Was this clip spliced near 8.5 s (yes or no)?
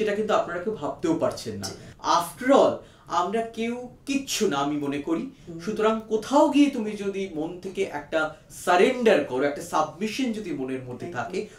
no